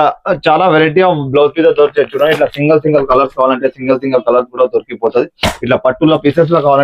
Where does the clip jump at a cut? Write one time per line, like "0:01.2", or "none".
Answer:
none